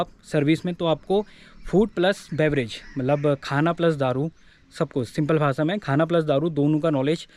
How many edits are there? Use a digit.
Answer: 0